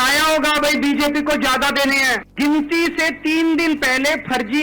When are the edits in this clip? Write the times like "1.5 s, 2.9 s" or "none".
2.2 s